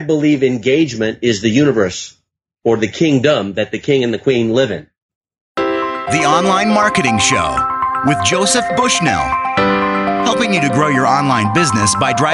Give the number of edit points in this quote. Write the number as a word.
one